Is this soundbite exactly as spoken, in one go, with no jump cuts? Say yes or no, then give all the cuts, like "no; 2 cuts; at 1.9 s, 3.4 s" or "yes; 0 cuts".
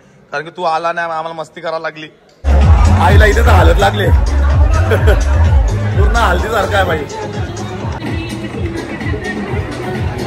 no; 2 cuts; at 2.5 s, 8.0 s